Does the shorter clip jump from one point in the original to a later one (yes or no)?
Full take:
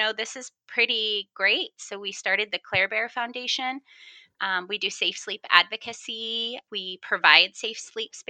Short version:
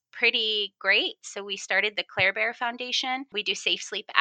yes